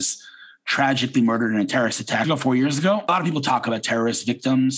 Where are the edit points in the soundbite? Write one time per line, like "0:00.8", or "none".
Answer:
0:02.2
0:03.1